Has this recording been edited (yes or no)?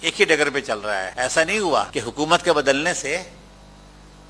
yes